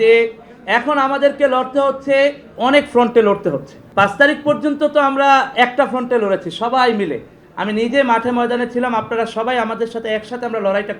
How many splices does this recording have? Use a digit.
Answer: 2